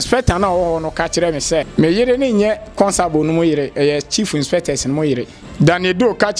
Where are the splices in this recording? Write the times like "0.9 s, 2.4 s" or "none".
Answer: 1.7 s, 5.4 s